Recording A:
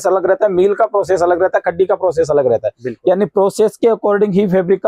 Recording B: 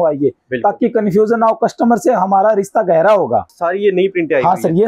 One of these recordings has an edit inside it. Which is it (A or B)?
B